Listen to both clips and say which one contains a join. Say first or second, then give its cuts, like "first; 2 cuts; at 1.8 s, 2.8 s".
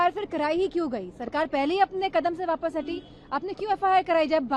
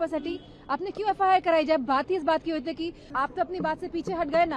second; 1 cut; at 3.0 s